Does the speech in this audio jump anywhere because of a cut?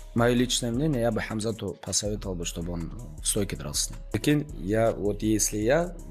yes; 1 cut; at 4.1 s

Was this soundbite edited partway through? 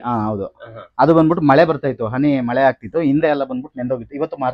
no; 0 cuts

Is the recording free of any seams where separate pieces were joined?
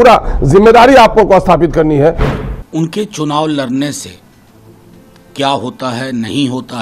no; 1 cut; at 2.3 s

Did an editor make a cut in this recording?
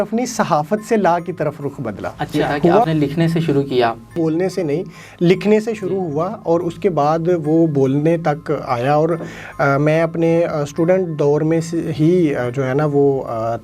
yes; 2 cuts; at 2.9 s, 4.1 s

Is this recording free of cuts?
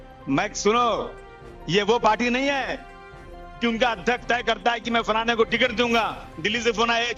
yes; 0 cuts

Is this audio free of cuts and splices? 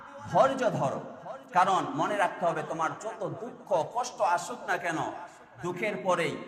yes; 0 cuts

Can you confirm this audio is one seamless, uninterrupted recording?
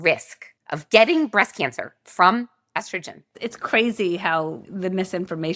no; 1 cut; at 4.7 s

